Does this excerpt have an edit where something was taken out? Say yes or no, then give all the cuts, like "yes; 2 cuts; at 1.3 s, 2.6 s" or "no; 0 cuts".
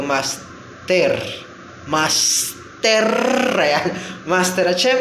no; 0 cuts